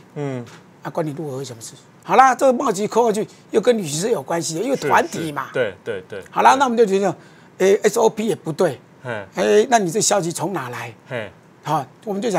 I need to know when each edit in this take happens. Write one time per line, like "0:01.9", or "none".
0:01.9